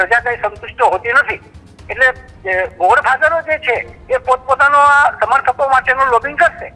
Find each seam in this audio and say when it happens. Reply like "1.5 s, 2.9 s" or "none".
none